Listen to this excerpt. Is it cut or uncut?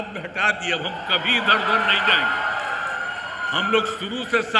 uncut